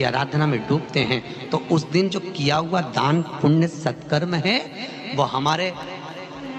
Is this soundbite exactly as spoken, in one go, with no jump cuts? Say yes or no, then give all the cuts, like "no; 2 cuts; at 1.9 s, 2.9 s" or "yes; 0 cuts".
yes; 0 cuts